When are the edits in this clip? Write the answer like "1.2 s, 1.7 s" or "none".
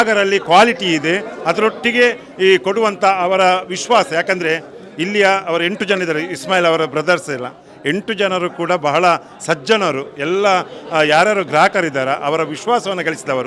none